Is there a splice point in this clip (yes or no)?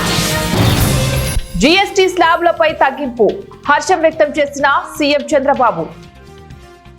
yes